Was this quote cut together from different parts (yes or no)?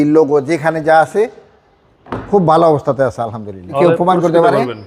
yes